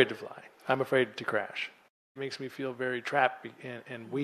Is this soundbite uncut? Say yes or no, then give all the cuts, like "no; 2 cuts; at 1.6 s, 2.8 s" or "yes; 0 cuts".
no; 1 cut; at 2.1 s